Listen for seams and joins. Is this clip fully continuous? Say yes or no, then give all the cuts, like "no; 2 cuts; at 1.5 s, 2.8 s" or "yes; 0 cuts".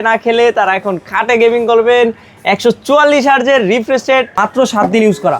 no; 1 cut; at 4.4 s